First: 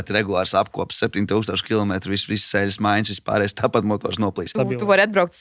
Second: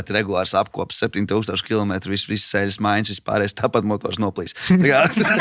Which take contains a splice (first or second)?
first